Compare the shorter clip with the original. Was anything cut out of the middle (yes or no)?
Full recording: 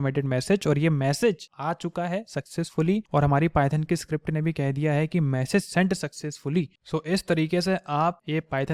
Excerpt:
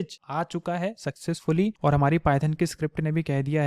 no